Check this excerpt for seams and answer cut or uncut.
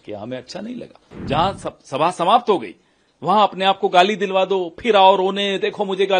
cut